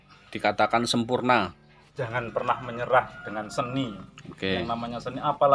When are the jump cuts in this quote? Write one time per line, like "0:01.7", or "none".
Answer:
0:02.0